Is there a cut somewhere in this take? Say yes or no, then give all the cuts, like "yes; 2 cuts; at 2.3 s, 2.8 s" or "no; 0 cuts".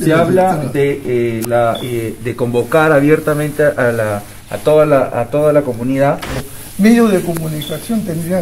yes; 1 cut; at 6.4 s